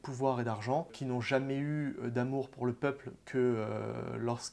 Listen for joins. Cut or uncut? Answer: cut